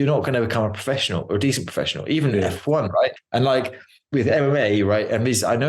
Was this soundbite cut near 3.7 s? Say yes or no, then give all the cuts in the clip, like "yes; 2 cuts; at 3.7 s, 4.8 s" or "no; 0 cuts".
yes; 1 cut; at 3.7 s